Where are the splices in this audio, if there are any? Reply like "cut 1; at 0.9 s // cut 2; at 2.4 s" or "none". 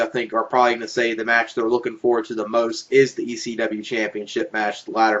cut 1; at 3.7 s